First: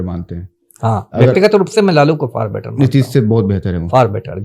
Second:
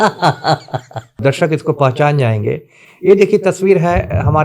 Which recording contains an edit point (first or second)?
second